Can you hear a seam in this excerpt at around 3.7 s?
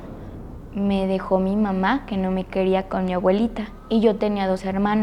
yes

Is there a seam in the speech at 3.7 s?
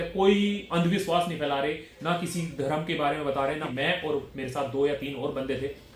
yes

